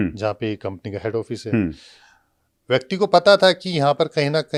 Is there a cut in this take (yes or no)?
no